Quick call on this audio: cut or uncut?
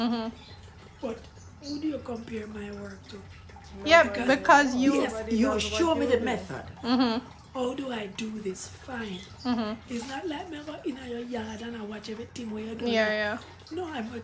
uncut